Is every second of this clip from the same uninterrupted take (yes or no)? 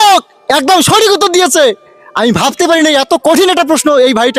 yes